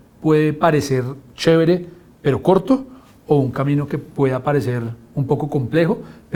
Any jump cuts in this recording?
no; 0 cuts

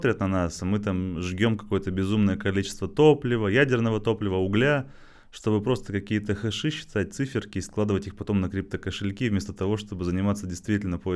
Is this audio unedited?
yes; 0 cuts

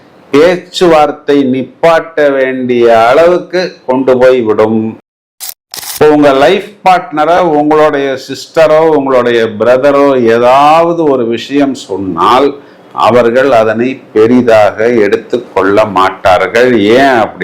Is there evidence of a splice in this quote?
yes; 1 cut; at 5.4 s

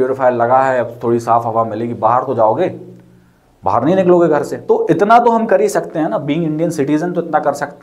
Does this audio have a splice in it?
yes; 1 cut; at 4.5 s

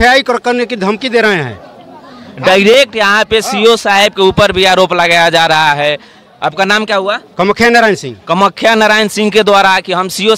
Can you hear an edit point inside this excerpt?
no; 0 cuts

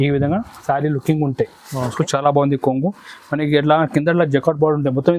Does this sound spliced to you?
yes; 1 cut; at 2.0 s

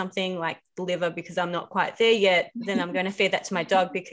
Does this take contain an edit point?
yes; 1 cut; at 2.6 s

